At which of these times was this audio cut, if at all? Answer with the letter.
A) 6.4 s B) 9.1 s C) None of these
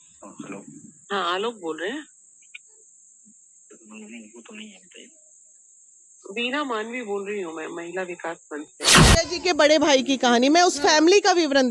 B